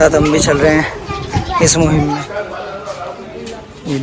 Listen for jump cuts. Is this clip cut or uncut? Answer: cut